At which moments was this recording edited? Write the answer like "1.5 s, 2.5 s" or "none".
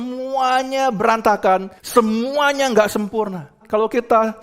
1.8 s, 3.6 s